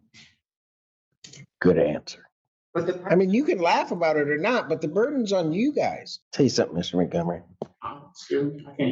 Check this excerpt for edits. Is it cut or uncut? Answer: cut